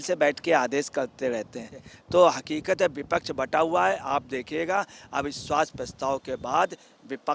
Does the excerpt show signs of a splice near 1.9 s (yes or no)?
yes